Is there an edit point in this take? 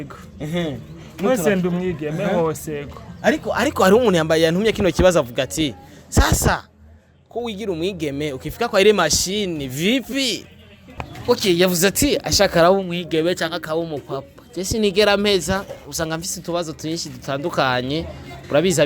yes; 1 cut; at 10.9 s

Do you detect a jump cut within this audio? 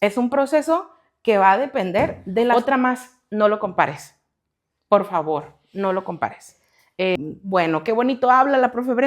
yes; 2 cuts; at 2.5 s, 7.2 s

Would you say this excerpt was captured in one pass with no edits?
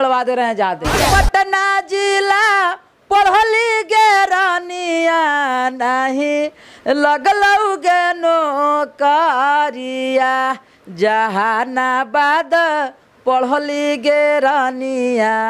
no; 1 cut; at 1.0 s

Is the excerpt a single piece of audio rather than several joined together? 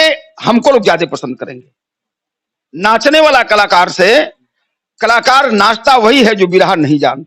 yes; 0 cuts

